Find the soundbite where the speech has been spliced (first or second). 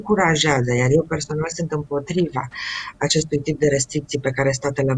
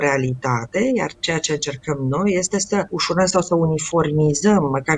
second